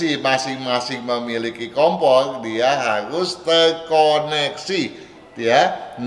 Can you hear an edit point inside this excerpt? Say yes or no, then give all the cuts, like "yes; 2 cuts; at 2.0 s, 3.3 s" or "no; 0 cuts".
no; 0 cuts